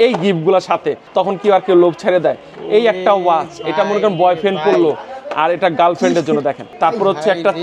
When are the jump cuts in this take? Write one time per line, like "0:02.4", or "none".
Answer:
0:01.0
0:06.7